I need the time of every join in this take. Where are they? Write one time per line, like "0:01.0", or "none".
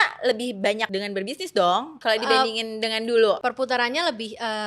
0:00.9
0:01.9
0:03.4